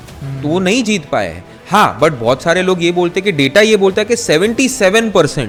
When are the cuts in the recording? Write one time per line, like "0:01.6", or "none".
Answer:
none